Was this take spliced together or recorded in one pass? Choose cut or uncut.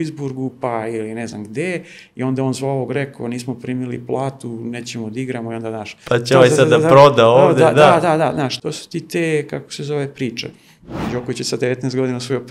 cut